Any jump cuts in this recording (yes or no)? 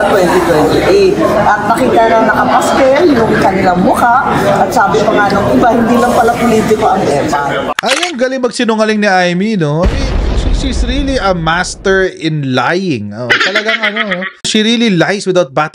yes